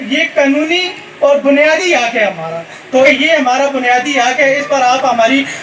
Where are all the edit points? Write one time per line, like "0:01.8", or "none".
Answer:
0:03.1